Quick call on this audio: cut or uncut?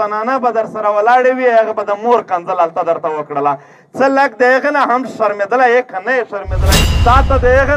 cut